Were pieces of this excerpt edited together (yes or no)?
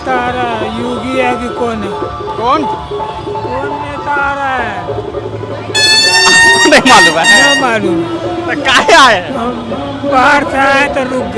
no